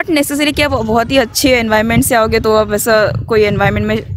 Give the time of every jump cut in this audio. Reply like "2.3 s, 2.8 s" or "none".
none